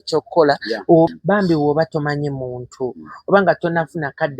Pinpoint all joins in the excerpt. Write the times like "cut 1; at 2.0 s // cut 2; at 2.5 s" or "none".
cut 1; at 1.1 s